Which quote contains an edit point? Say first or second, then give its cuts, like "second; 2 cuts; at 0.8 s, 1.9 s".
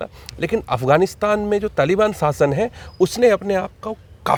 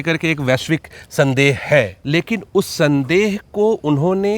second; 1 cut; at 2.0 s